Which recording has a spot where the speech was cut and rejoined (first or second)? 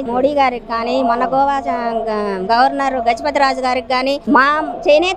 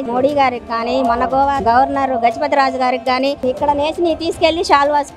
second